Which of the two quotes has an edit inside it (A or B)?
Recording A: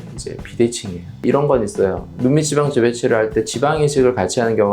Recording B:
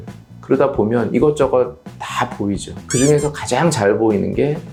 A